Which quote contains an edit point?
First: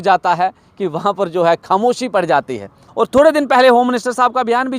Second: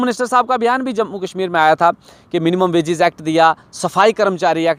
first; 1 cut; at 2.8 s

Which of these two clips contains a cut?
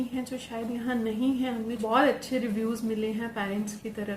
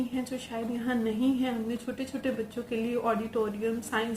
first; 1 cut; at 1.8 s

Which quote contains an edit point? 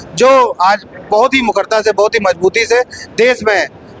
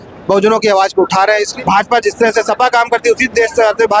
second; 1 cut; at 1.5 s

